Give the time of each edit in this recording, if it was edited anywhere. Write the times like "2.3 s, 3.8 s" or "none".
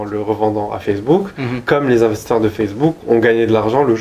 none